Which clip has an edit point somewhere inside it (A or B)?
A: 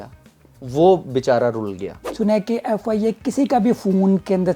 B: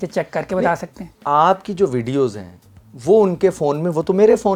A